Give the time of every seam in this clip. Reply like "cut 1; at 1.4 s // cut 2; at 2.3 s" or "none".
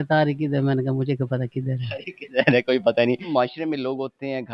cut 1; at 3.2 s